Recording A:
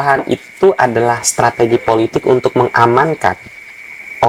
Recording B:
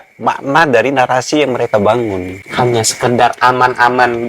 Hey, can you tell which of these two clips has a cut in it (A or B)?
B